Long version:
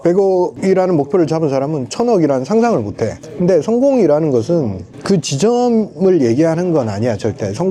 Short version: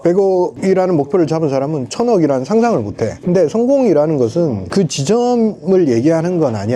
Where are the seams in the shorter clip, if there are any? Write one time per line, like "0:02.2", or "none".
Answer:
0:03.1
0:04.6